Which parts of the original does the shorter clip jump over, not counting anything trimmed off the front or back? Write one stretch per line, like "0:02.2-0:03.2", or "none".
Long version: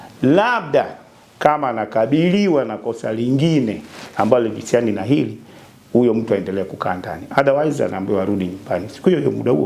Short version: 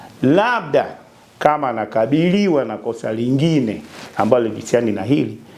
none

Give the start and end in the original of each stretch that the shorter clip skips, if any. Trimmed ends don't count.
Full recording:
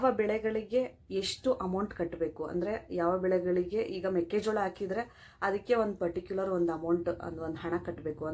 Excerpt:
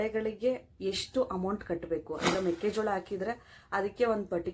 0:02.6-0:04.0

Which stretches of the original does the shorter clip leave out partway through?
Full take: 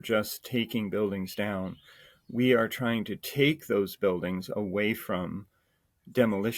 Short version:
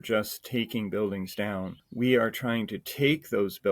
0:01.8-0:02.2

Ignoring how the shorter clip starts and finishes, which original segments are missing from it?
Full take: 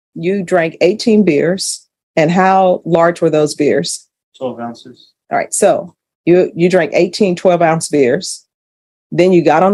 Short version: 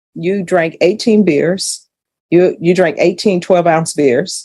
0:02.0-0:05.9

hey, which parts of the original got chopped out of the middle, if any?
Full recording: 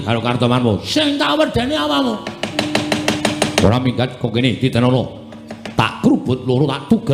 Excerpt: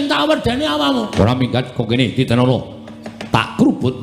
0:02.2-0:03.6

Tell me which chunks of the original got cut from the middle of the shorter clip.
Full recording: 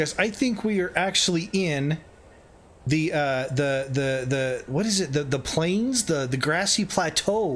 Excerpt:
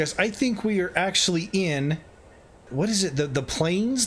0:02.7-0:04.6

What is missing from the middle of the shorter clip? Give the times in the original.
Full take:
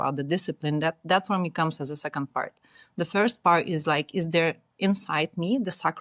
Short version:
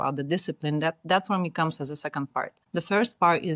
0:02.6-0:02.8

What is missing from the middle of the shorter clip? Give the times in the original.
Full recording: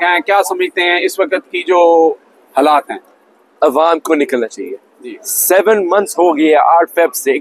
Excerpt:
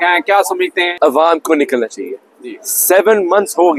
0:00.9-0:03.5

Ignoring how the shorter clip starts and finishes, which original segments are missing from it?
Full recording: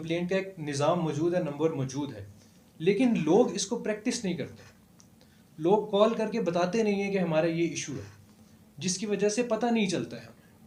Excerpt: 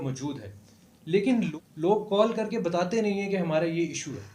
0:03.2-0:05.3

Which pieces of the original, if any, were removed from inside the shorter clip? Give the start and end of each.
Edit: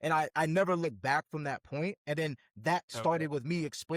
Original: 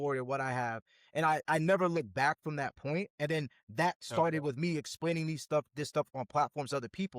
none

